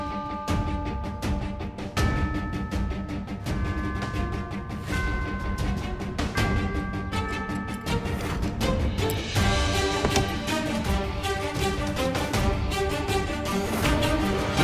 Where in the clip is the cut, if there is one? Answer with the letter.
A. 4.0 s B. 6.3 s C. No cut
A